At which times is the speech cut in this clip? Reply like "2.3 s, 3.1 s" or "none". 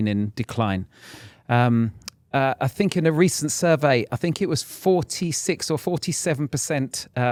none